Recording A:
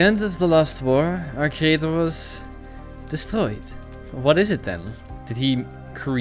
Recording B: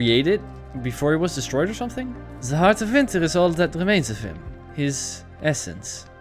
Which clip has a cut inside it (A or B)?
A